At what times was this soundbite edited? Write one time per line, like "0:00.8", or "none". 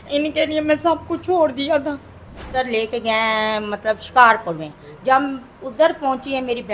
0:02.5